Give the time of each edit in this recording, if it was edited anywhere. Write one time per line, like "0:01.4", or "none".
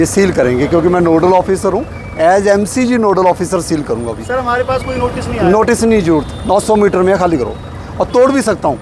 none